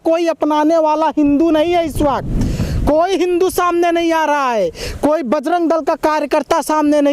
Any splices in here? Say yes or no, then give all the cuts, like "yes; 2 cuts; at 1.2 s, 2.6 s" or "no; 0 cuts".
no; 0 cuts